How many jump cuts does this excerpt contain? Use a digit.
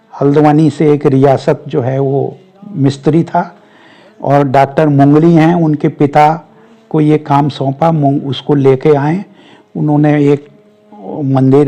0